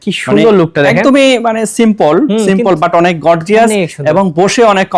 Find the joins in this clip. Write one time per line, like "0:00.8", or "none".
none